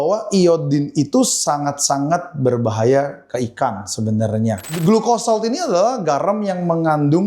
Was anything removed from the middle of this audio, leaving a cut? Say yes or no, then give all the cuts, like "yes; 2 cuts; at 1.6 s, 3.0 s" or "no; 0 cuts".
yes; 1 cut; at 4.8 s